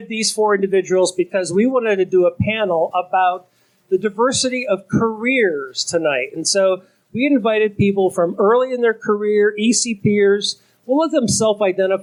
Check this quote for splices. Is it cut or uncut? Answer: uncut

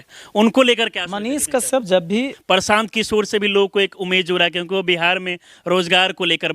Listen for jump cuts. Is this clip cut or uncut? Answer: cut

